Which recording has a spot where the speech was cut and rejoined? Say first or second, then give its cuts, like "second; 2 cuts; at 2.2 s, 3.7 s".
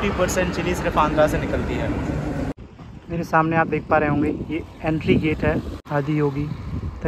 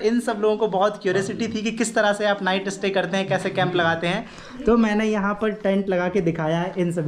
first; 2 cuts; at 2.5 s, 5.8 s